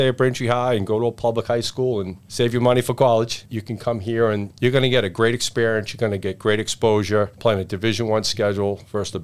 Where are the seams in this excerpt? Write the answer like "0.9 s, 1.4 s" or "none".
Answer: 2.2 s, 4.5 s, 7.3 s